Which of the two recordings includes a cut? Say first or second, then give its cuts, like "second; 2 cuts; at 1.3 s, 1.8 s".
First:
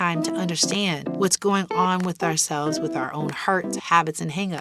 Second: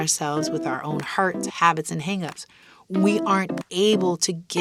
first; 1 cut; at 1.1 s